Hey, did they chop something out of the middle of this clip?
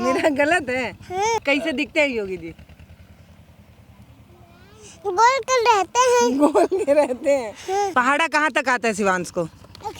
yes; 2 cuts; at 1.4 s, 7.9 s

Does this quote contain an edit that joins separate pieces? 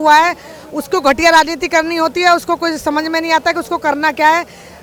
no; 0 cuts

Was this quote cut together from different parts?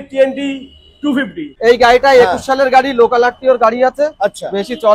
yes; 1 cut; at 1.4 s

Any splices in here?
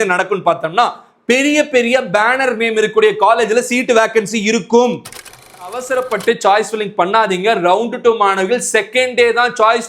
yes; 1 cut; at 5.7 s

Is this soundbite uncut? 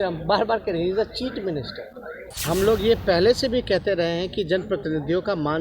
no; 1 cut; at 2.2 s

